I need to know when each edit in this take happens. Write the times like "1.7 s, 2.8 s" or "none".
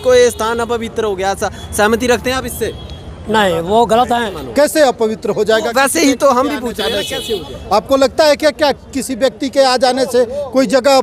4.4 s